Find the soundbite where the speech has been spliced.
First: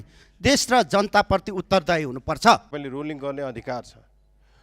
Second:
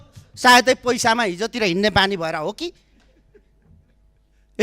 first; 1 cut; at 2.8 s

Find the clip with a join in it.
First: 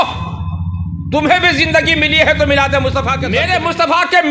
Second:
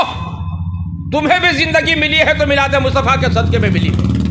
first; 1 cut; at 3.2 s

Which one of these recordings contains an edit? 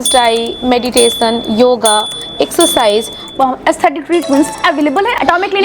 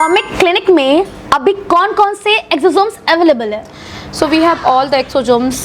first; 2 cuts; at 3.3 s, 4.5 s

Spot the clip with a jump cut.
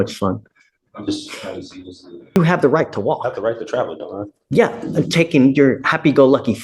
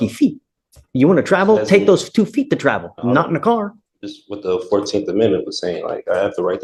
first; 1 cut; at 2.4 s

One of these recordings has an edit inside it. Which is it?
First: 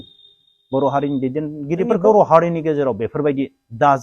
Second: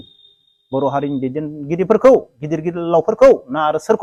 first; 1 cut; at 1.9 s

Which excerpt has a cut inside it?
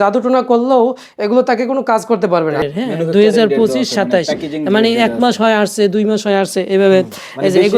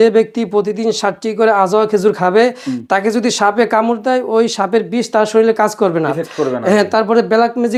first; 1 cut; at 2.7 s

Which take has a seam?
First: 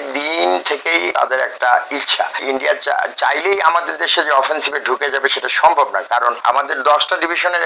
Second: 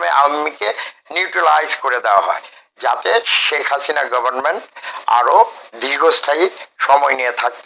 first; 3 cuts; at 1.1 s, 2.4 s, 6.4 s

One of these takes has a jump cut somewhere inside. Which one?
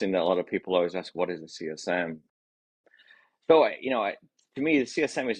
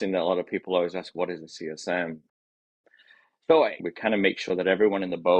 second; 1 cut; at 3.8 s

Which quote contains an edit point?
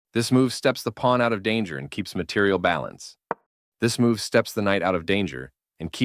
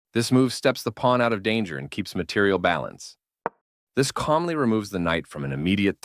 second; 1 cut; at 3.2 s

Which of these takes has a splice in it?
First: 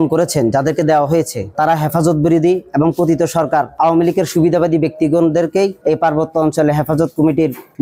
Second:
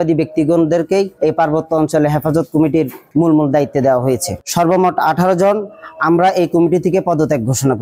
second; 1 cut; at 4.4 s

